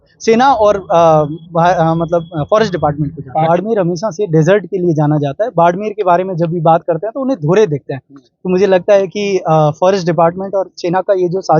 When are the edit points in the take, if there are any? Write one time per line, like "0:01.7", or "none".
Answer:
0:03.5